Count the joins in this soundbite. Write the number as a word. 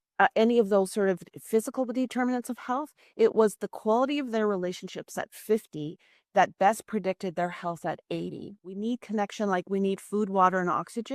one